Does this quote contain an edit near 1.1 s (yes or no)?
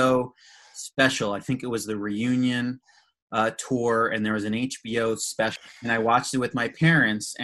no